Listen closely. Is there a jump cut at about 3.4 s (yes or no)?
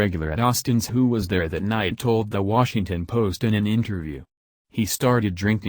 yes